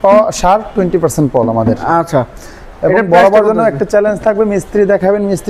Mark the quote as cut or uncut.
uncut